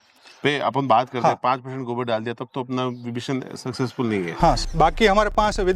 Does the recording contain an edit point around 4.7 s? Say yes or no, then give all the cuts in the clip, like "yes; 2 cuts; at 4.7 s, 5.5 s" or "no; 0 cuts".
yes; 1 cut; at 4.7 s